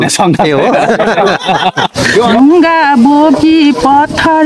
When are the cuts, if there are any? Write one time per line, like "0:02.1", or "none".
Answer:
0:02.3